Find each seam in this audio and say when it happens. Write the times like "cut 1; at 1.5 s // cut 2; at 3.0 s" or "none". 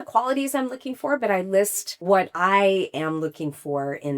cut 1; at 2.2 s

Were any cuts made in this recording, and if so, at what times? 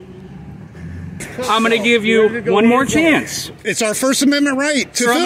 cut 1; at 1.3 s

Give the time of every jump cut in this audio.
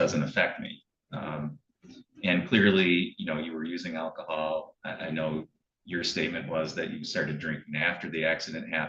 none

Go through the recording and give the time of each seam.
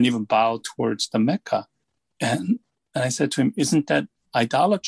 none

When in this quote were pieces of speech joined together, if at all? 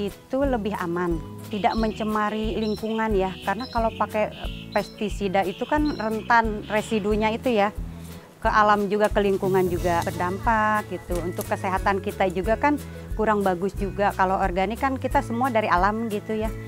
cut 1; at 1.5 s // cut 2; at 10.1 s // cut 3; at 14.1 s

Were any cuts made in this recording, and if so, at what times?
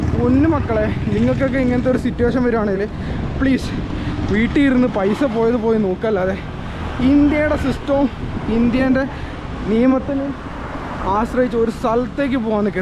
none

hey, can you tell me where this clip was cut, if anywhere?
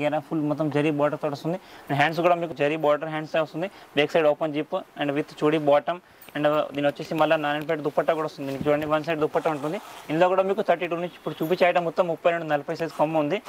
none

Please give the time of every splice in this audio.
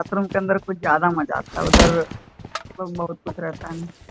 cut 1; at 2.5 s

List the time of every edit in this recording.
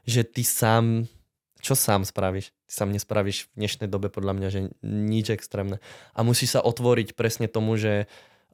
none

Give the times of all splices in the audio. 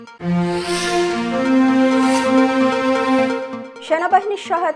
none

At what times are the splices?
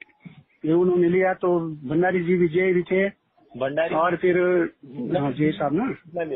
none

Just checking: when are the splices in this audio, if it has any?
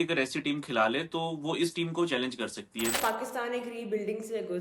cut 1; at 3.0 s

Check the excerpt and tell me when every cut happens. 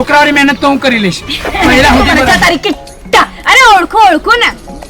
cut 1; at 2.2 s

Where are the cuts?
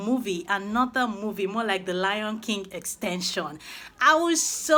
none

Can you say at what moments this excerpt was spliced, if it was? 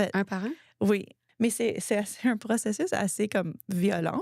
cut 1; at 1.2 s

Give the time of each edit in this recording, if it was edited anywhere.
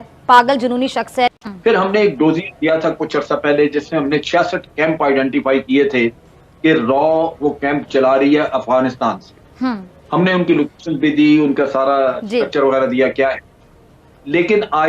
cut 1; at 1.3 s

